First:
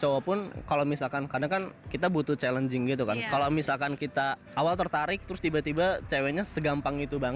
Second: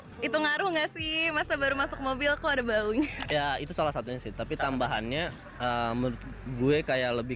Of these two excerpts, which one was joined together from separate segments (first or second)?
second